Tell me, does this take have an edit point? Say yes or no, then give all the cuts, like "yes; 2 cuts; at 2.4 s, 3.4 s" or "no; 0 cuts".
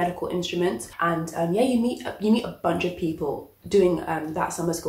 yes; 1 cut; at 0.9 s